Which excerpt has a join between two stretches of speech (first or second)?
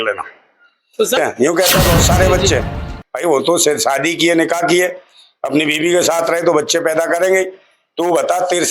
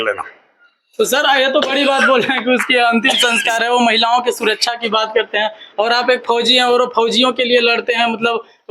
first